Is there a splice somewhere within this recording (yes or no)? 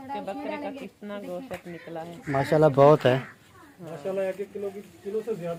no